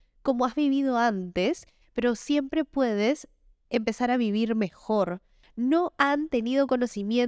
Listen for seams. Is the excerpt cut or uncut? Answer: cut